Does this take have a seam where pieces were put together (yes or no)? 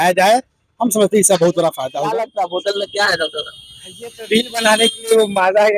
yes